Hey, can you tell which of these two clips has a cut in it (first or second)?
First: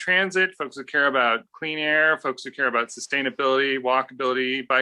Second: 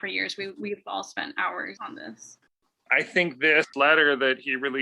second